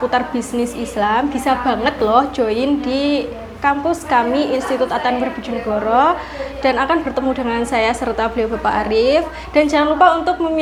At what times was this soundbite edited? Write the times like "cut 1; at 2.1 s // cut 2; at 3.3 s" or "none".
none